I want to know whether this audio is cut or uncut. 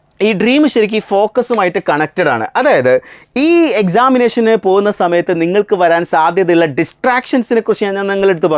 uncut